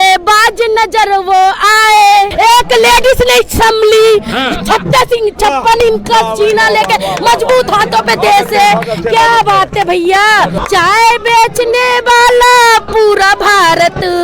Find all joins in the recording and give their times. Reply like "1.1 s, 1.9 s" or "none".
2.3 s, 10.6 s